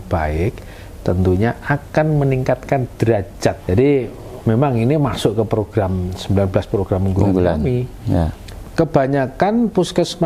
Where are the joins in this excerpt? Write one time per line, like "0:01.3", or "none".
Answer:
0:03.6
0:08.5